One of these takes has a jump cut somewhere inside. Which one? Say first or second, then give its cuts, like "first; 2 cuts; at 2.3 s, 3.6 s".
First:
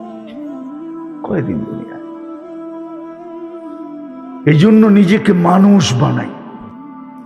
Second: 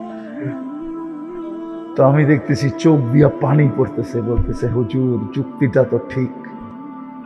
second; 2 cuts; at 1.2 s, 6.3 s